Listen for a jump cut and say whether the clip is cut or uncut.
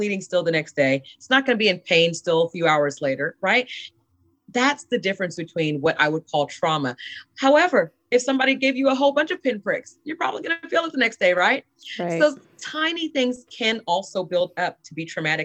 uncut